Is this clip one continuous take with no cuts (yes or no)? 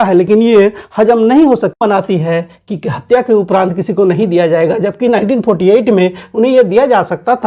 no